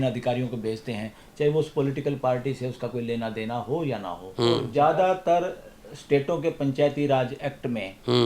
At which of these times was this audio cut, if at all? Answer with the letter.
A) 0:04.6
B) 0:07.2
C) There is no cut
A